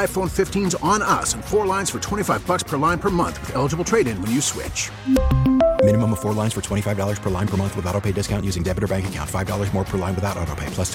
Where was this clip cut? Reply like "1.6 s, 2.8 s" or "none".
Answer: none

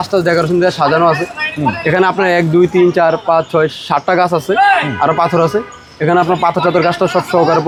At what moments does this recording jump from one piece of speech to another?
none

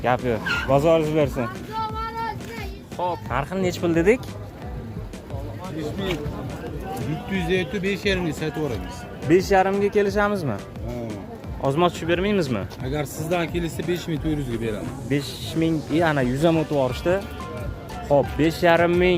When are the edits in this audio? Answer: 3.2 s

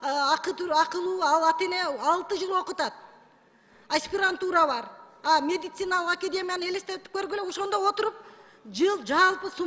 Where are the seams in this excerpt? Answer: none

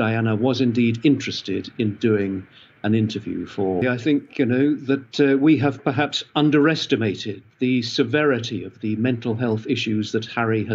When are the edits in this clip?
3.8 s

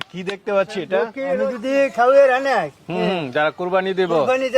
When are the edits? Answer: 1.5 s

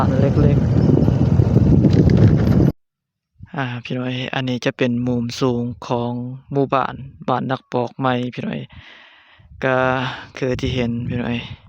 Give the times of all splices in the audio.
2.7 s

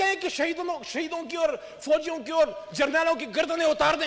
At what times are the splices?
none

